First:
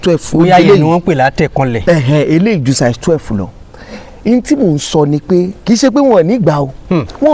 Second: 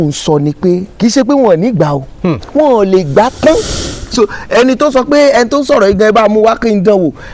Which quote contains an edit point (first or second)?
second